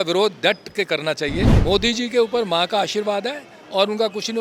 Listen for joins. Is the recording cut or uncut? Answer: cut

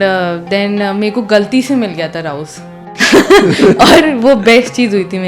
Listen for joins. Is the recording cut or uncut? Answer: cut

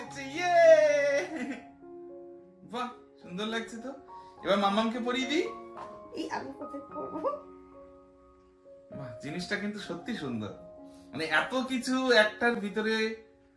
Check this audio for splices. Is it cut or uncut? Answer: uncut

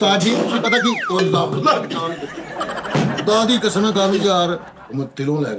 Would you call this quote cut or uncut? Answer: cut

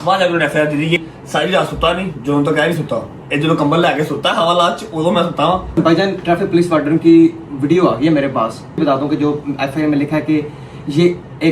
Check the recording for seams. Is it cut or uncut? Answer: cut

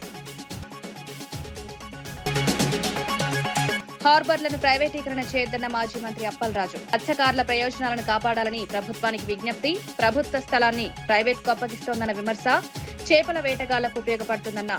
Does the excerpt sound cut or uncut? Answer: uncut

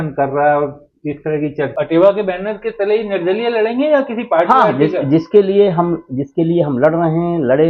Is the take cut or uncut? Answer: cut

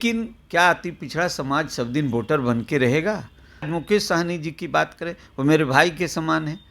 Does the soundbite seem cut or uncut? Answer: cut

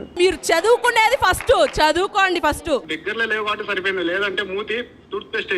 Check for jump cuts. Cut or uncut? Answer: cut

